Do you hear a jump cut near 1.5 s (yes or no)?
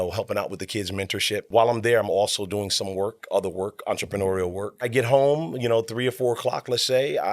yes